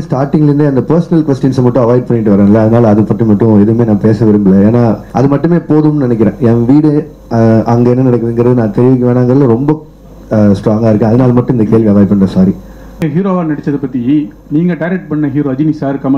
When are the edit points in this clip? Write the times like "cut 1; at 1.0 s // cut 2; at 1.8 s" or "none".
cut 1; at 5.0 s // cut 2; at 13.0 s